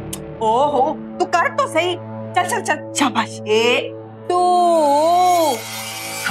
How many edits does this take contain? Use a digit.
1